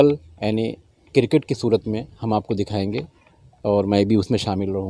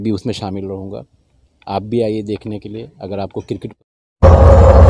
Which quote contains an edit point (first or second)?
second